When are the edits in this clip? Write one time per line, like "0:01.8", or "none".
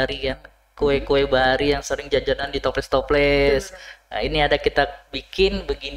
none